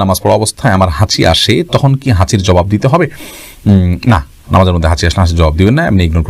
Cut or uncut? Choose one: uncut